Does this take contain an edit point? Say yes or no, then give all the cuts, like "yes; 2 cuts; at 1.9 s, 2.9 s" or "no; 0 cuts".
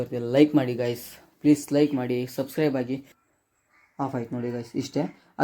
yes; 1 cut; at 3.2 s